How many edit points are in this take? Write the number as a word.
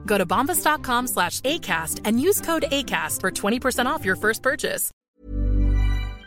one